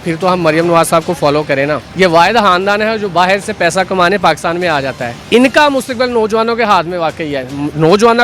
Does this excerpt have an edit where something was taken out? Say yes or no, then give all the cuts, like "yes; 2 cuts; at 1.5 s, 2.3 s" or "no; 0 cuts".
yes; 2 cuts; at 1.9 s, 5.2 s